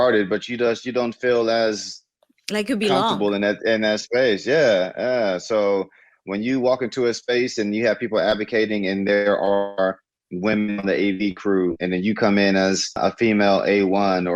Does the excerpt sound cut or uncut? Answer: cut